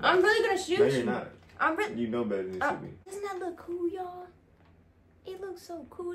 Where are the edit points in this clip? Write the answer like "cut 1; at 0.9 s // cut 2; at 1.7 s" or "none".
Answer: cut 1; at 3.0 s